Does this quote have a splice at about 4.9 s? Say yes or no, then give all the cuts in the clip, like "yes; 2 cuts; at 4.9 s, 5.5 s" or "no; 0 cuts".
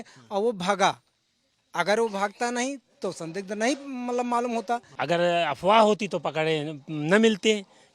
yes; 1 cut; at 4.9 s